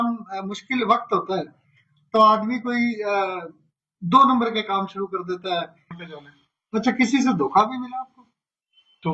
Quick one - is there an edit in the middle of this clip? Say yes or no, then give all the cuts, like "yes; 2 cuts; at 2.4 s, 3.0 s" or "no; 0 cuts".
yes; 1 cut; at 6.0 s